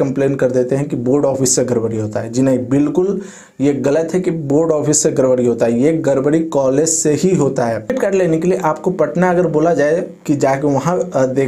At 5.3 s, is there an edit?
no; 1 cut; at 7.9 s

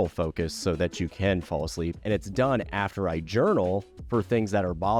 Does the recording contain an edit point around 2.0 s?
yes; 1 cut; at 2.0 s

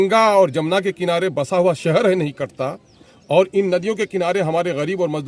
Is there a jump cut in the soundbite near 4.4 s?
no; 0 cuts

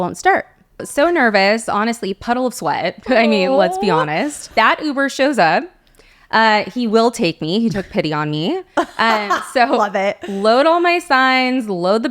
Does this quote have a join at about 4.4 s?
yes; 2 cuts; at 0.9 s, 4.4 s

